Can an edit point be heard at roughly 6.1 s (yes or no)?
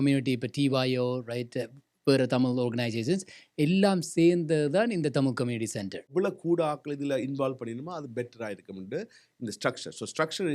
yes